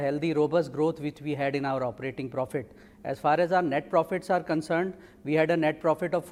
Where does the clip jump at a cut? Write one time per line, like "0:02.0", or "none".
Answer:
none